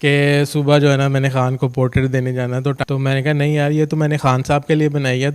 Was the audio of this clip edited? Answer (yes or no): yes